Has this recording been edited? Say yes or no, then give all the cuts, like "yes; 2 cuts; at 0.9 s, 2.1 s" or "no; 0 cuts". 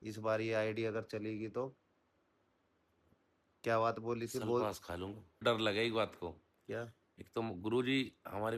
yes; 1 cut; at 5.4 s